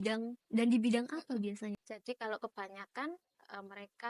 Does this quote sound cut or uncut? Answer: cut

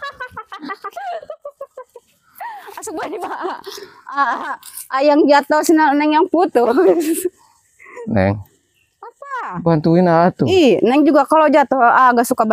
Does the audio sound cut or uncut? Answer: uncut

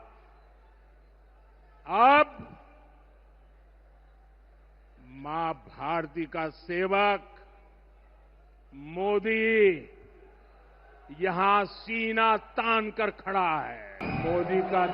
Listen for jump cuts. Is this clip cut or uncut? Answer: cut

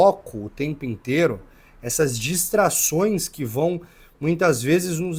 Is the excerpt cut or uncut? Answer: uncut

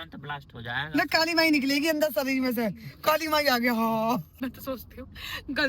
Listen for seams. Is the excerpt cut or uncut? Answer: cut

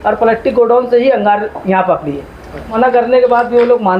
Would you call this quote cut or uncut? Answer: cut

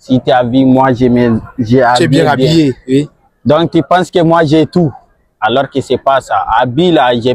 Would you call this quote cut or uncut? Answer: uncut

